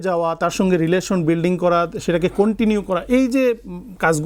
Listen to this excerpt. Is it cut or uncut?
uncut